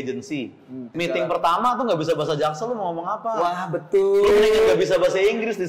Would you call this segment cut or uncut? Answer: cut